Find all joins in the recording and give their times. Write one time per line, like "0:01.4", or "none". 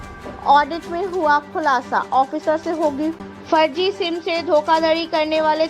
0:03.2

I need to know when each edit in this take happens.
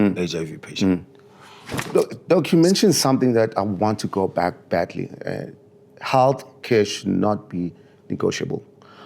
0:01.8

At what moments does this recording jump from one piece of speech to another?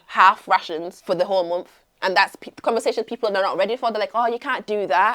0:00.9

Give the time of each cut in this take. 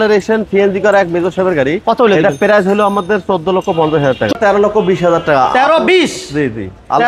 0:04.3

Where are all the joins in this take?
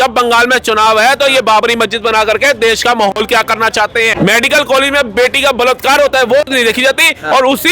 0:04.1

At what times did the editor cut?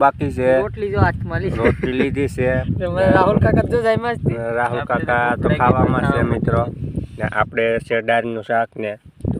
none

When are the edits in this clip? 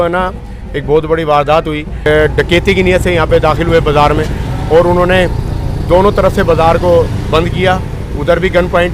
0:02.1

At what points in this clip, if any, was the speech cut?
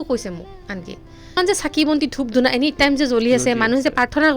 0:01.4

